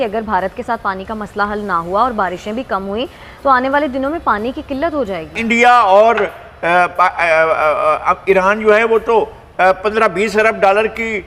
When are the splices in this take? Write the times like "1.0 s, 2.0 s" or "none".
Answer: 5.4 s